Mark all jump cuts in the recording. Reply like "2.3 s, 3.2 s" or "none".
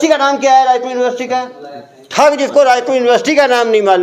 none